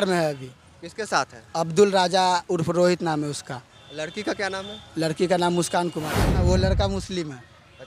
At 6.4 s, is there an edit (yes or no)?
yes